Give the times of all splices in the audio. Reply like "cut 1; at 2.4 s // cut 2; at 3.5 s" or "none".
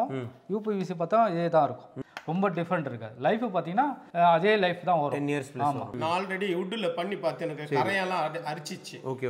cut 1; at 1.9 s // cut 2; at 5.9 s